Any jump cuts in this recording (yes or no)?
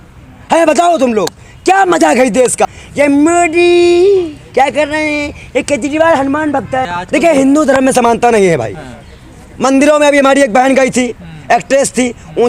yes